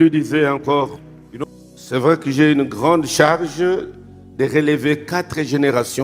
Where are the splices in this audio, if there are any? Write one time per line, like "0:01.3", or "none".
0:01.3